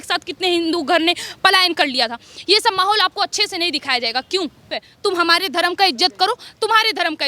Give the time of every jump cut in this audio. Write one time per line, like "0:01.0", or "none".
0:04.8